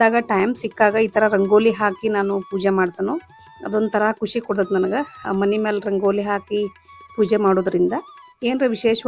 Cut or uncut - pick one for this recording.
uncut